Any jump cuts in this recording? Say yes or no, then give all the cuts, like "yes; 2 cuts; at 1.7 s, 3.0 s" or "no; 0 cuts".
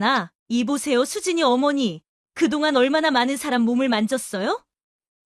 no; 0 cuts